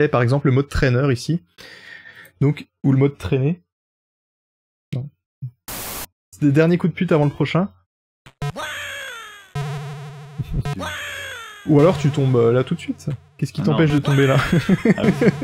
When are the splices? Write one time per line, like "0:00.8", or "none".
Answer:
0:06.0
0:10.6